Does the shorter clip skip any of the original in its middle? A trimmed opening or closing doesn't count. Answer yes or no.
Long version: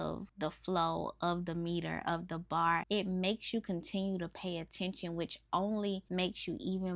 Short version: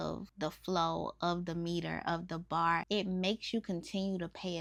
no